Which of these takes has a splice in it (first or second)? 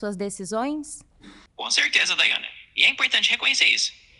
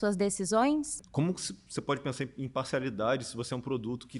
second